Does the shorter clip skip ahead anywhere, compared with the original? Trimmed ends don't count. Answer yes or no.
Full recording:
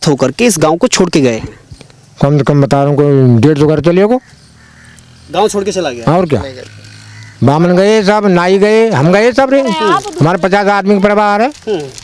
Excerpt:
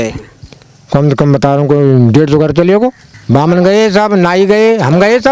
yes